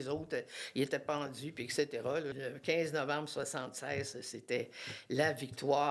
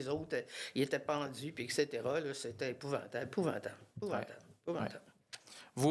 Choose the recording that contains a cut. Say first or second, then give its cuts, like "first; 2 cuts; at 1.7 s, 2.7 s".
first; 1 cut; at 2.4 s